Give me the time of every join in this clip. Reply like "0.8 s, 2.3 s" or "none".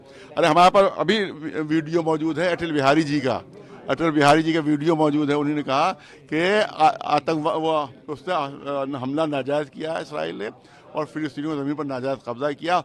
none